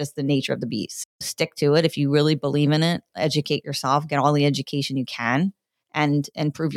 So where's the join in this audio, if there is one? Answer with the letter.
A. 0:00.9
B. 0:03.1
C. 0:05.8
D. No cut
A